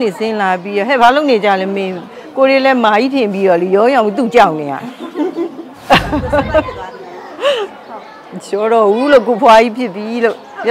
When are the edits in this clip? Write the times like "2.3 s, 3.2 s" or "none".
5.7 s